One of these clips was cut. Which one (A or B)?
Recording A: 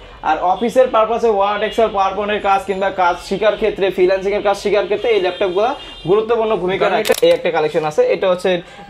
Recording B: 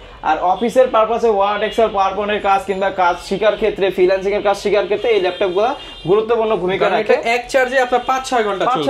A